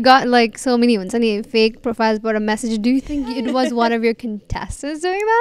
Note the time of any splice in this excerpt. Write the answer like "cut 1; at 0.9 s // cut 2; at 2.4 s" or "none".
none